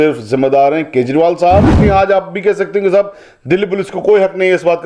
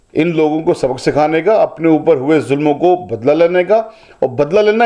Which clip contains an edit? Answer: first; 1 cut; at 1.7 s

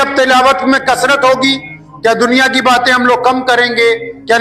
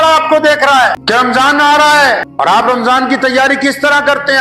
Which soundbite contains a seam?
second; 2 cuts; at 1.0 s, 2.3 s

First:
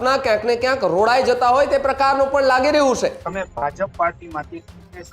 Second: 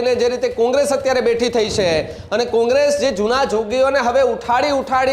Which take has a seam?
first; 1 cut; at 3.2 s

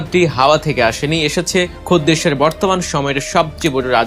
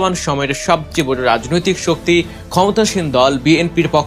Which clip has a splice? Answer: first; 1 cut; at 1.8 s

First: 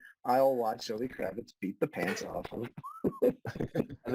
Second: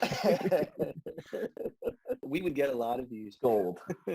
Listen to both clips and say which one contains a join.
second; 1 cut; at 2.2 s

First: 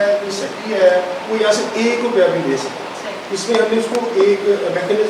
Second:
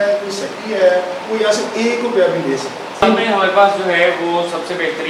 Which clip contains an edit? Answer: second; 1 cut; at 3.0 s

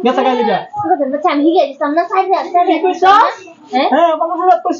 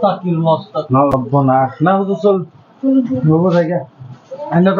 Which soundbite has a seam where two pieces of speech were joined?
second; 1 cut; at 1.1 s

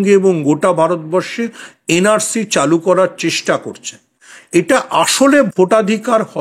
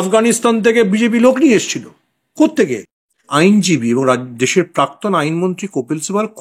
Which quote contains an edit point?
second; 1 cut; at 3.3 s

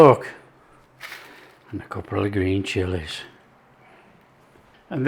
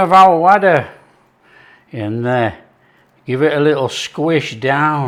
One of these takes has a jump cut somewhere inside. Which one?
first; 1 cut; at 1.5 s

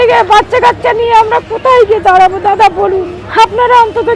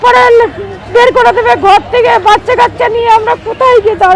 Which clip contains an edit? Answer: first; 1 cut; at 3.2 s

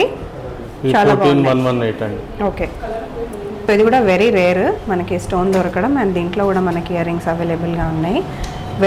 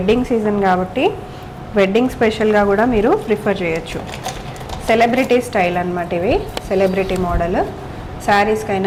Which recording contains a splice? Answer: first; 1 cut; at 3.7 s

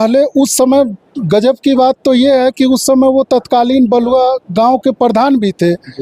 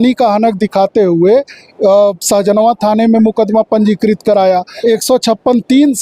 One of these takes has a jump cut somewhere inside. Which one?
second; 1 cut; at 4.7 s

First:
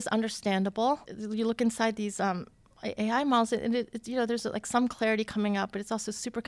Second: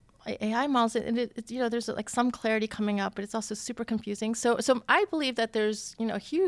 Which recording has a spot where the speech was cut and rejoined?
first; 1 cut; at 1.1 s

